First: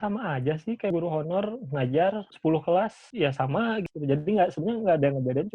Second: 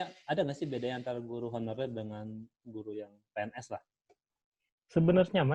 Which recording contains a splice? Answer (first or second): first